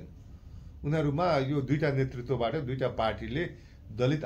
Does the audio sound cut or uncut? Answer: uncut